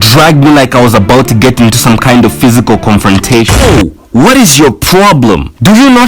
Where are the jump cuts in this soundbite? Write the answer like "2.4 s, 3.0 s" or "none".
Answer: 3.6 s